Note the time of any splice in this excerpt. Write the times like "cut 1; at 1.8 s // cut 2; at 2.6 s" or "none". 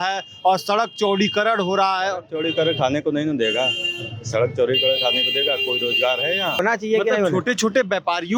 cut 1; at 6.6 s